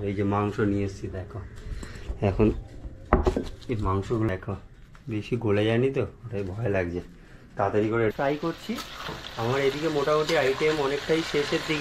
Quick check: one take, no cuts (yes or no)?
no